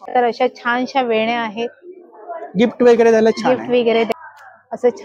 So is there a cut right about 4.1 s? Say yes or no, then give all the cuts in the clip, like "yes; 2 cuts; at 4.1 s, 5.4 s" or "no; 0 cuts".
yes; 1 cut; at 4.1 s